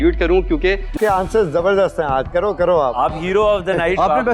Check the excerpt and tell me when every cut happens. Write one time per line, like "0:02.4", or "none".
0:00.9